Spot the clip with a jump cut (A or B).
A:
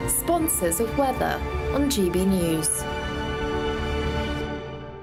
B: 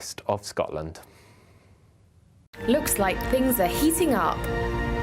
B